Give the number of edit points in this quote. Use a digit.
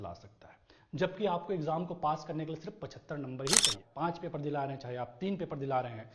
1